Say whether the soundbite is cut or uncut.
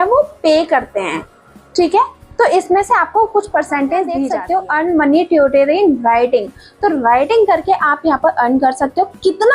cut